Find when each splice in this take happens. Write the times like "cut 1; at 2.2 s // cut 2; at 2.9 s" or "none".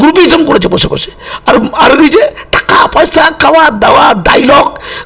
none